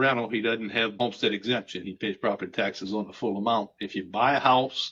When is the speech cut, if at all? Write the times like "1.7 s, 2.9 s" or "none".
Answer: 1.0 s